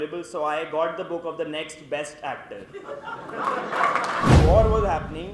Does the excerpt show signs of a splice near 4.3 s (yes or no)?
yes